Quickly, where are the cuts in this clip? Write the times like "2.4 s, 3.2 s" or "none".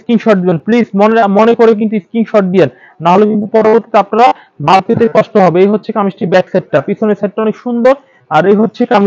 none